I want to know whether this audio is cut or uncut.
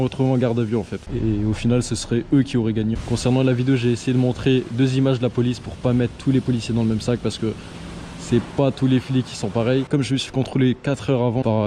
uncut